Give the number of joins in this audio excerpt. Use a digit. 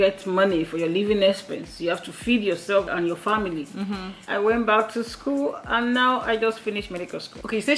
2